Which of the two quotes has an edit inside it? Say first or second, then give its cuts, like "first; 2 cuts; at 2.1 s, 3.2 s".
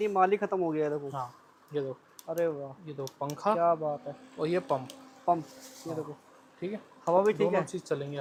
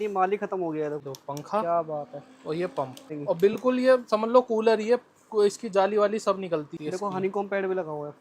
second; 3 cuts; at 1.0 s, 3.1 s, 6.7 s